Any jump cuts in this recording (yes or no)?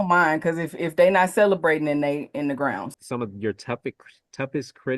yes